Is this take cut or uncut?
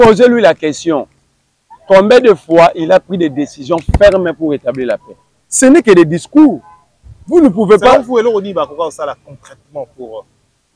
uncut